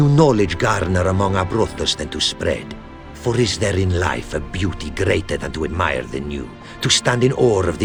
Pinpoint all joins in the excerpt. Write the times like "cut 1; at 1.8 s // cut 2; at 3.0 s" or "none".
none